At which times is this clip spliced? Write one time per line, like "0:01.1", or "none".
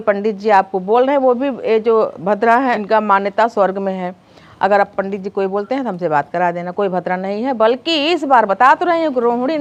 none